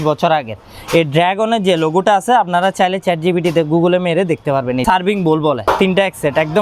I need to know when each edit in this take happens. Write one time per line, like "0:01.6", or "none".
0:04.8
0:05.6